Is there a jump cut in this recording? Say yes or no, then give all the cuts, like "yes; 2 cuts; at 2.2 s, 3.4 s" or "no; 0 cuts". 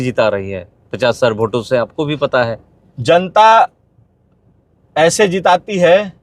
no; 0 cuts